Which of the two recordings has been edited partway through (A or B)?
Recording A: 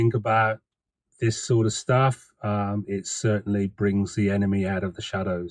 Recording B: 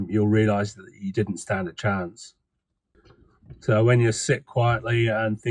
B